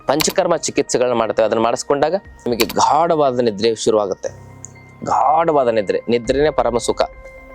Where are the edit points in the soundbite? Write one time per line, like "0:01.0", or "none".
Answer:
0:02.5